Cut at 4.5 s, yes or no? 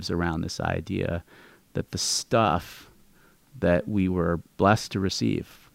yes